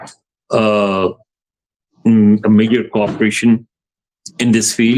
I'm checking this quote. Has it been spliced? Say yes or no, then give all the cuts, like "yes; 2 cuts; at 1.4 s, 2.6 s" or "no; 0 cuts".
no; 0 cuts